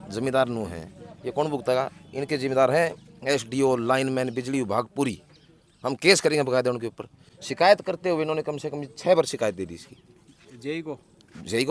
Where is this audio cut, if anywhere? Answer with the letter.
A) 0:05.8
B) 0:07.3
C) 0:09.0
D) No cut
D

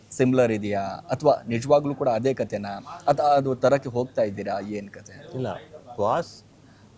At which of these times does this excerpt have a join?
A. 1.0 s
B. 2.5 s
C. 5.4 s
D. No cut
D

